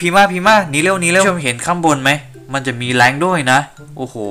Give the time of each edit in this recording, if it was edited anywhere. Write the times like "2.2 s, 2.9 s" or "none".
1.2 s